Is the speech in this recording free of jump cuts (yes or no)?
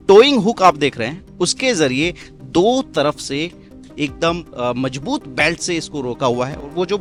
yes